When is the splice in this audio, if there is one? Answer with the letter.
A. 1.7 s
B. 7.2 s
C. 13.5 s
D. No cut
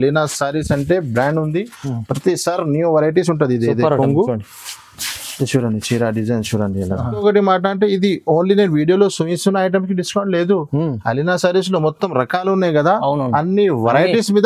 B